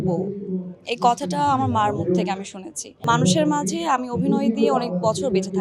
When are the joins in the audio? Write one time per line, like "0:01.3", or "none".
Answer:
0:03.0